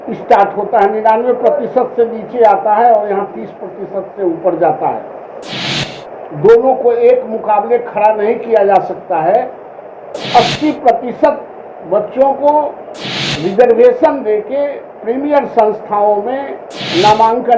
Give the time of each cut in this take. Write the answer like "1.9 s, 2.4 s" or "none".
10.1 s